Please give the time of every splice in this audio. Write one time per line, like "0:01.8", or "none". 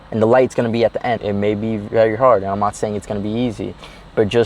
0:01.2